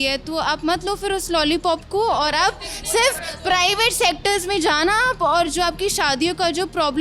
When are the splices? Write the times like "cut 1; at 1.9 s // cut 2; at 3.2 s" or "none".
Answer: none